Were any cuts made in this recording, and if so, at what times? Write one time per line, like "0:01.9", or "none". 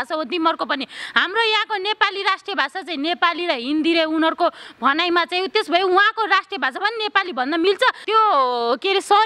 0:08.0